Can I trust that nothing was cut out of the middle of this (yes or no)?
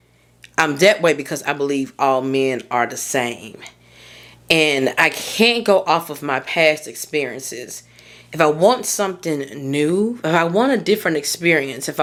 yes